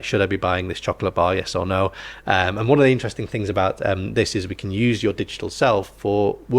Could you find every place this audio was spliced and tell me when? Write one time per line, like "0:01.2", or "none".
none